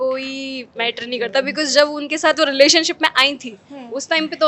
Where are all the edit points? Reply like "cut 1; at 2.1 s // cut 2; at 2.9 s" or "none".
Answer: none

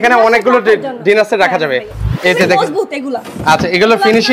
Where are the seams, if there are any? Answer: cut 1; at 2.1 s

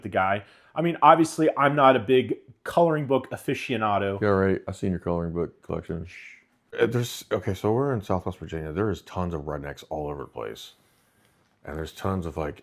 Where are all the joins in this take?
cut 1; at 6.8 s

